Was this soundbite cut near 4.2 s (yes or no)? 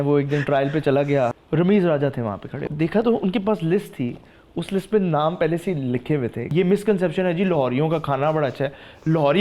no